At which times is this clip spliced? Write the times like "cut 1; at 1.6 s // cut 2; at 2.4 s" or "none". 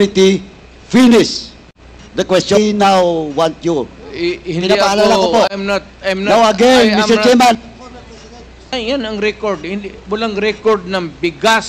cut 1; at 2.6 s // cut 2; at 8.7 s